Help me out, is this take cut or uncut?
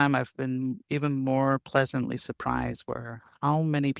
uncut